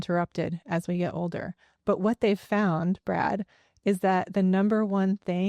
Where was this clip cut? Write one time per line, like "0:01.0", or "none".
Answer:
none